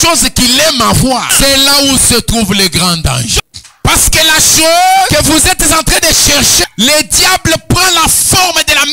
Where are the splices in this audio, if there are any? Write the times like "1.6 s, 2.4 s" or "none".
1.3 s, 3.3 s, 5.1 s, 6.7 s